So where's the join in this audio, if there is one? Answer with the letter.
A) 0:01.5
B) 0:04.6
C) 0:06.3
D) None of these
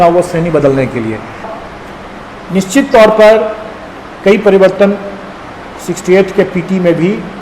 A